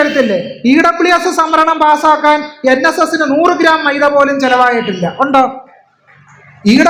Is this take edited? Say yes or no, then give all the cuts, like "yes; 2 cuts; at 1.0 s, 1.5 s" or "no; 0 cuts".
no; 0 cuts